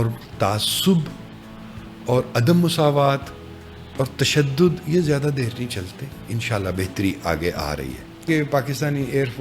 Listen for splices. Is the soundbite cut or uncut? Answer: cut